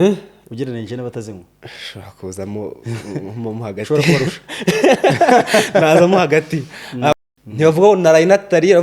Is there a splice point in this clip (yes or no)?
yes